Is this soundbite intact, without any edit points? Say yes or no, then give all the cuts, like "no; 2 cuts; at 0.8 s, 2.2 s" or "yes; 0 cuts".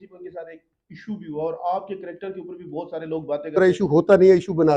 no; 1 cut; at 3.6 s